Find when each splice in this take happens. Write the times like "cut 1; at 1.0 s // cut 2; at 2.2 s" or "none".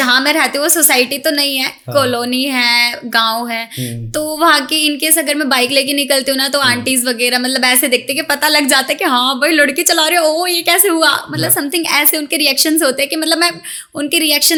none